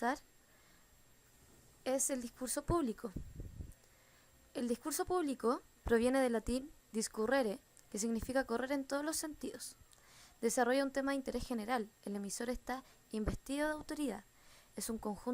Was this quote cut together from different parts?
yes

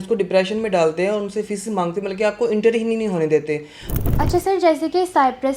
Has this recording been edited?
yes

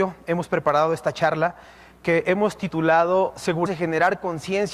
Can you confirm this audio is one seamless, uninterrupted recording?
yes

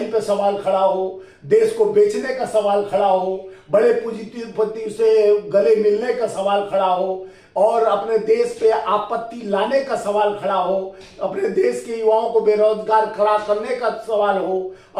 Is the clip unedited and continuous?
yes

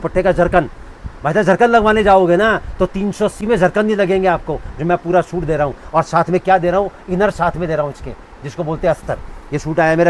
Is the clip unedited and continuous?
yes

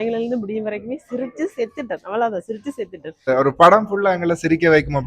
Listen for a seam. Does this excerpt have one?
yes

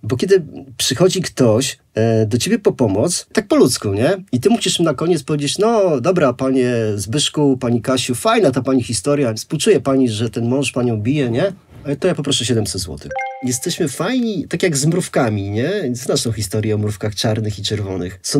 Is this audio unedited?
no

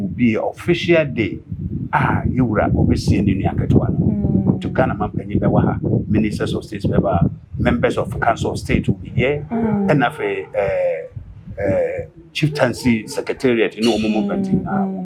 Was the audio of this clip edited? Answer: no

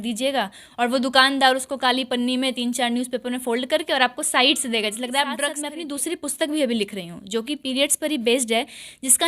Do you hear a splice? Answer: yes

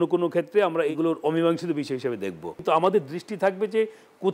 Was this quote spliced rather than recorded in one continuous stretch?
yes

